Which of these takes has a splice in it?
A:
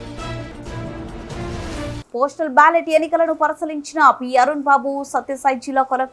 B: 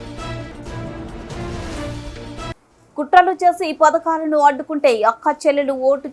A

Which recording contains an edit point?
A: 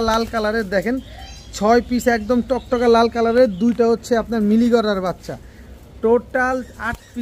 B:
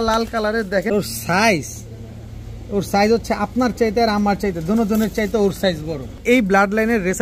B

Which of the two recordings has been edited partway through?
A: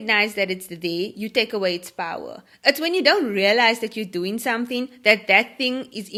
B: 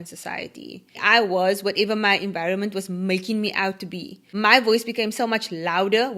B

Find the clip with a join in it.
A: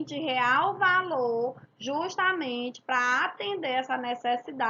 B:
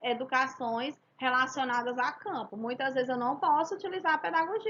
A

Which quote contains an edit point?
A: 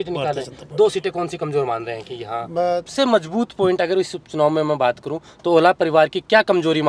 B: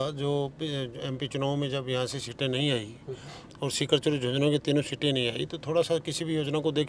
A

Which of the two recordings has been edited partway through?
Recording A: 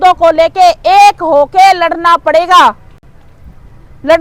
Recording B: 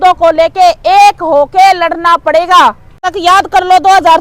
B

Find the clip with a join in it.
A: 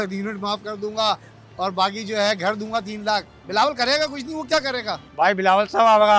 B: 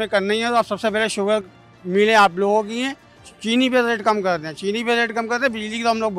A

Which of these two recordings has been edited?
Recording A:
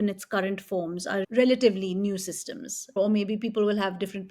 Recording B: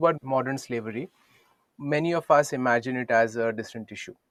A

